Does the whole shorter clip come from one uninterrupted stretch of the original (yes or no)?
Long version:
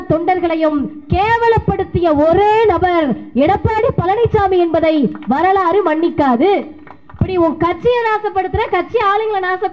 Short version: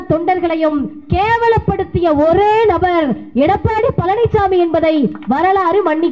yes